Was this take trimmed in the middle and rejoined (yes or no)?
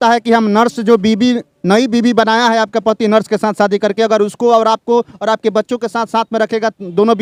no